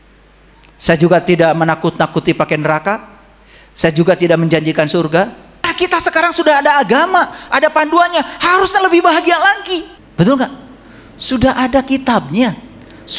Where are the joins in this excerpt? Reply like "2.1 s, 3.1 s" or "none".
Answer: 5.7 s, 10.0 s

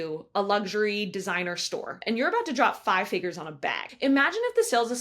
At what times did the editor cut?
2.0 s, 3.9 s

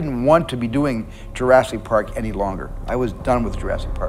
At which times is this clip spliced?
none

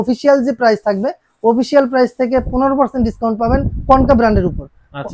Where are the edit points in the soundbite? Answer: none

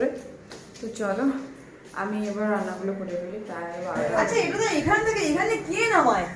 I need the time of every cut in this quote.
4.0 s

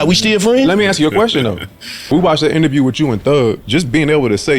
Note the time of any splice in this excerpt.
2.1 s, 3.6 s

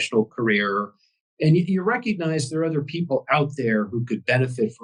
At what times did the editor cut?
none

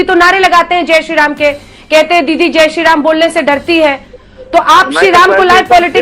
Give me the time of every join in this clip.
none

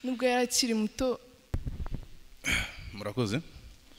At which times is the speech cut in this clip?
1.3 s

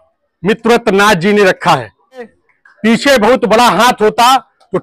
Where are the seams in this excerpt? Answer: 2.4 s

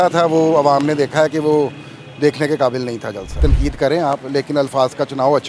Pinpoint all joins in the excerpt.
3.4 s

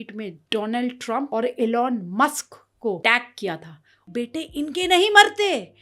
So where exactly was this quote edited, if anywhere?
1.3 s, 3.0 s, 4.1 s

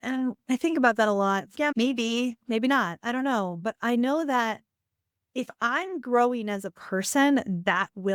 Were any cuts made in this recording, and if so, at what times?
none

